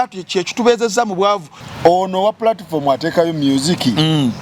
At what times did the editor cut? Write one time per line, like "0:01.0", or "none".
0:01.6